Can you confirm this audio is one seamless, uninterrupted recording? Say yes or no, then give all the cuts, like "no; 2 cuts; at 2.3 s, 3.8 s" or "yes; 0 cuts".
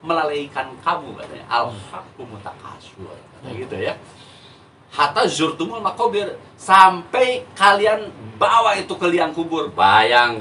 yes; 0 cuts